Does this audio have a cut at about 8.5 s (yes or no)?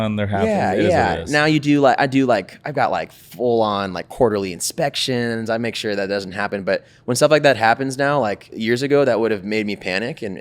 yes